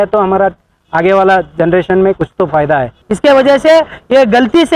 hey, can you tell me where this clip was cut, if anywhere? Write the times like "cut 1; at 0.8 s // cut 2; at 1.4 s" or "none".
cut 1; at 3.0 s